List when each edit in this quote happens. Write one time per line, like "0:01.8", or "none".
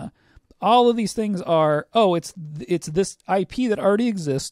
none